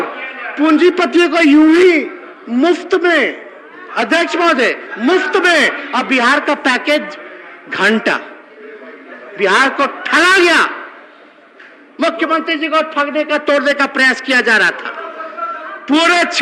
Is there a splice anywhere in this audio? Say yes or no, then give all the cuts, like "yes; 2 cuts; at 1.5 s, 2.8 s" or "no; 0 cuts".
no; 0 cuts